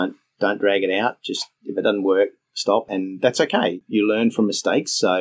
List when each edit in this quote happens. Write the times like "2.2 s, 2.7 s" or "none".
3.8 s